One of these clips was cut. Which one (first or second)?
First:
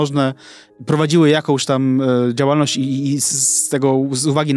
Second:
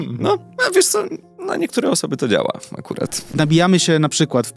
second